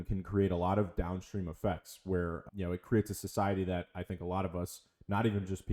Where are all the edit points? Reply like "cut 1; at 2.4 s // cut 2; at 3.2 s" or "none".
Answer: none